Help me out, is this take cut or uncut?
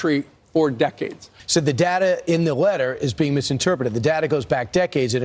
cut